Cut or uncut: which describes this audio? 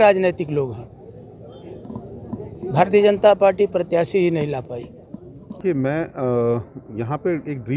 cut